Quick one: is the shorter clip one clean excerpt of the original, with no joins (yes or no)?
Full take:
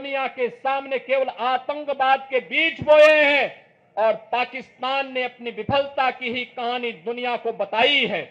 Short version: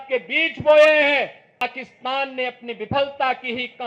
no